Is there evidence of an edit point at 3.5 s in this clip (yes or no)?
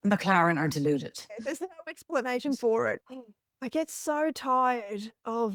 no